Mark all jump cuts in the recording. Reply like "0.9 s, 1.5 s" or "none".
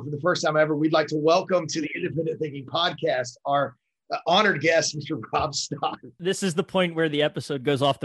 6.0 s